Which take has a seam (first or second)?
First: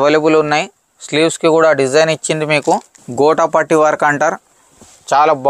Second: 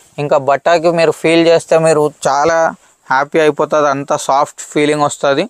first